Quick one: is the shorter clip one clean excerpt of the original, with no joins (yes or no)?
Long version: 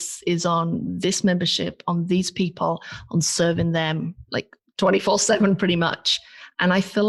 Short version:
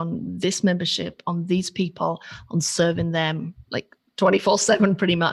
yes